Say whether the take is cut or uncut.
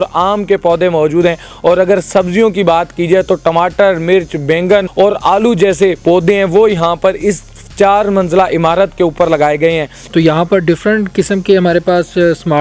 cut